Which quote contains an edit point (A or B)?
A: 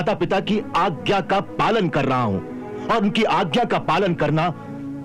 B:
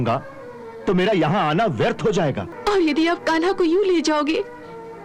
B